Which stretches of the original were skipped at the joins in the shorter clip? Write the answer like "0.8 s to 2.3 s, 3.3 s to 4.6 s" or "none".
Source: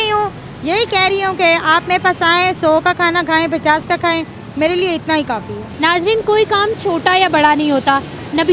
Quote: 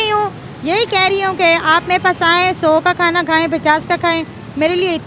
none